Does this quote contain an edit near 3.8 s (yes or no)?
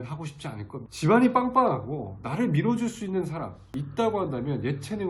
yes